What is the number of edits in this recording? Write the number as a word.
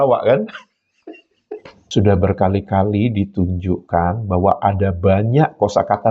one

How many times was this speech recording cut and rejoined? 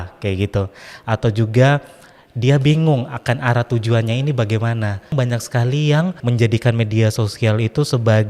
two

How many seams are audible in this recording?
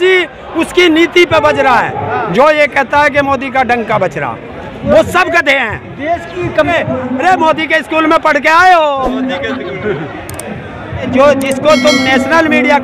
three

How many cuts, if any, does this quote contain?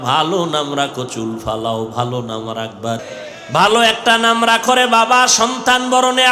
one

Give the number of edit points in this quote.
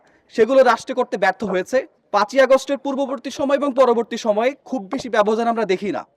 one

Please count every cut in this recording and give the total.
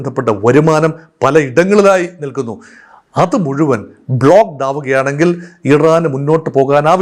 zero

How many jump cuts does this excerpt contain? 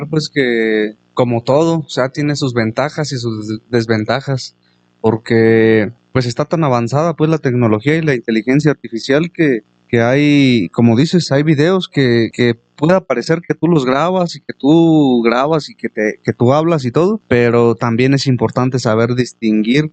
five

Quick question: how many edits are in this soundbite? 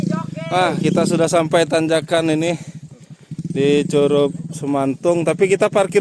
zero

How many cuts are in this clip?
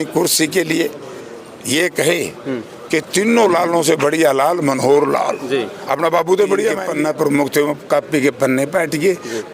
one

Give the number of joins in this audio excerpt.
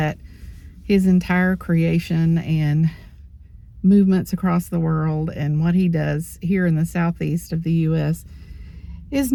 zero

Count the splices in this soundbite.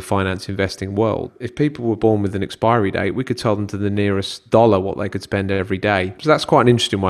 three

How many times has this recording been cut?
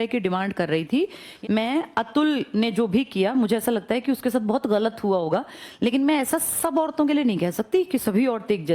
one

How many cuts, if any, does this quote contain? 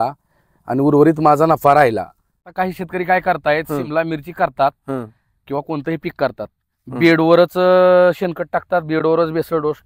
one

